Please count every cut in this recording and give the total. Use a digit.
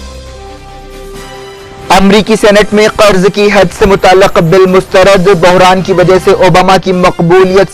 0